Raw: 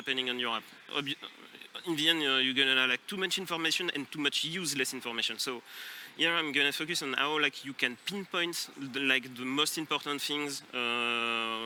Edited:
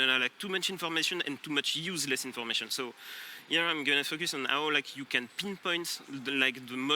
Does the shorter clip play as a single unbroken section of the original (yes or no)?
yes